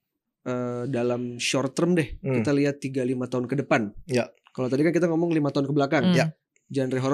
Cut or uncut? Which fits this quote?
uncut